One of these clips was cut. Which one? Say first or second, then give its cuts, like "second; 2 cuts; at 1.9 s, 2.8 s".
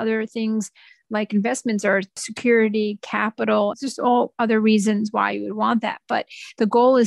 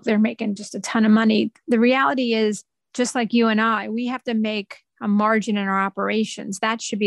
first; 2 cuts; at 2.1 s, 3.7 s